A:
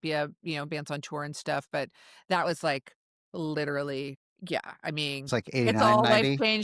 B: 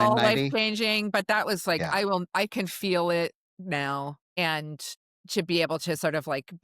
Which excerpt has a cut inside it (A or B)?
B